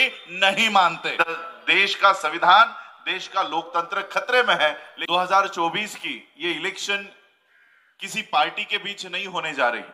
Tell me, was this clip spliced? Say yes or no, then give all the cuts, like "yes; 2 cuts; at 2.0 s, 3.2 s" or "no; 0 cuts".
yes; 2 cuts; at 1.2 s, 4.9 s